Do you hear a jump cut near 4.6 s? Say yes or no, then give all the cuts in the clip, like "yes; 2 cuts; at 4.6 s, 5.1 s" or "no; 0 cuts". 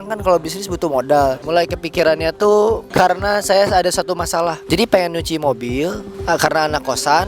yes; 4 cuts; at 1.4 s, 2.8 s, 4.6 s, 6.1 s